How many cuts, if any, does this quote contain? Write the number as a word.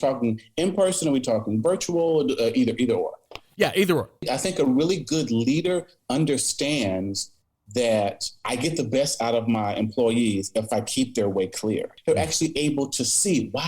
two